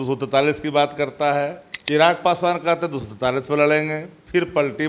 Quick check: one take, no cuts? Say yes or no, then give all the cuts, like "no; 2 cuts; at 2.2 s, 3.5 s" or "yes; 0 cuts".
no; 1 cut; at 1.7 s